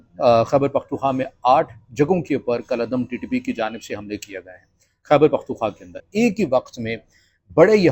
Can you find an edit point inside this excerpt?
yes; 1 cut; at 5.9 s

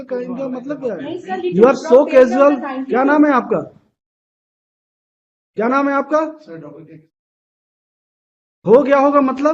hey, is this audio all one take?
no; 1 cut; at 1.4 s

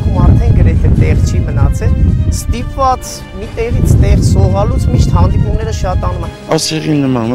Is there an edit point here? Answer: yes; 1 cut; at 6.3 s

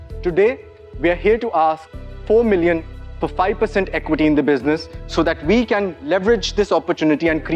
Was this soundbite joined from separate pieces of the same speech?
no; 0 cuts

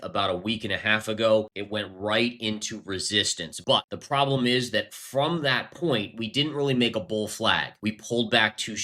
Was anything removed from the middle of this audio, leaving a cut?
yes; 3 cuts; at 1.6 s, 3.8 s, 7.7 s

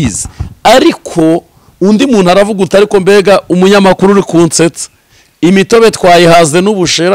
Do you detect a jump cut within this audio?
no; 0 cuts

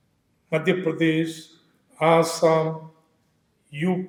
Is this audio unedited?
yes; 0 cuts

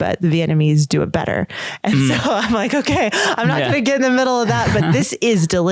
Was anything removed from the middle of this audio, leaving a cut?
no; 0 cuts

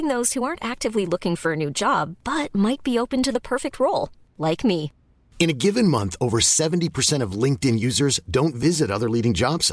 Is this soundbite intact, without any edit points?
yes; 0 cuts

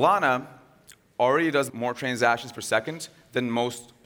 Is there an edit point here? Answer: yes; 1 cut; at 1.7 s

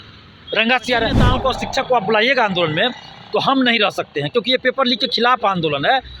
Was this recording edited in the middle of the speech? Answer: yes; 1 cut; at 1.2 s

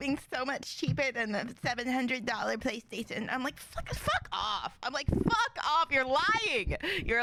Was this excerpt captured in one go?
yes; 0 cuts

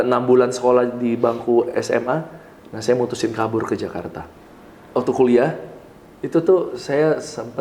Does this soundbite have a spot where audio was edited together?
yes; 1 cut; at 4.2 s

